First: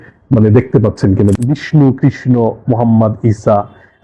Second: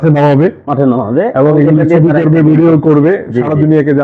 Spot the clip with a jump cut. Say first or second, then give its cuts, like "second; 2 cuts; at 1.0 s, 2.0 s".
first; 1 cut; at 1.3 s